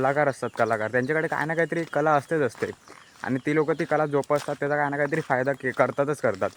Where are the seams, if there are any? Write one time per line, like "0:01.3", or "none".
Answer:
none